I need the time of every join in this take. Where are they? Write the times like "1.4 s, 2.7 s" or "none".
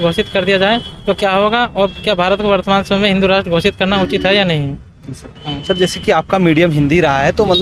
none